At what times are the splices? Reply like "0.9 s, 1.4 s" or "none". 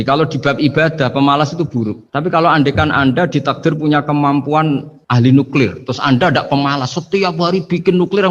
5.0 s